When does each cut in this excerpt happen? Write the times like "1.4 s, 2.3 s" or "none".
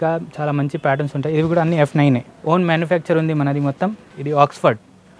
2.3 s, 4.1 s